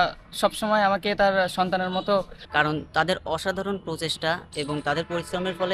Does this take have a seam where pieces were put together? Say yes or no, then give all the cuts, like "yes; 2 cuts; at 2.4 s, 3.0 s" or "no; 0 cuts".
yes; 1 cut; at 2.4 s